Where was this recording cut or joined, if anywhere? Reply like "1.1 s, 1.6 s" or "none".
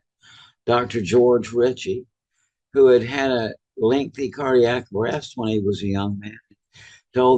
none